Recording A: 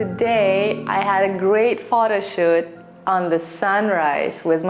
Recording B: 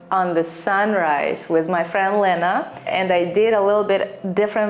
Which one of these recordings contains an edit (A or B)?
B